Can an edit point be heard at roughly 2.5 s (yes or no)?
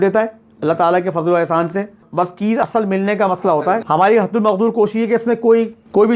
yes